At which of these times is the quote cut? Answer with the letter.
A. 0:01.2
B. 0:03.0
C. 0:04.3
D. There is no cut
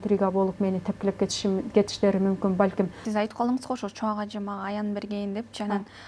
B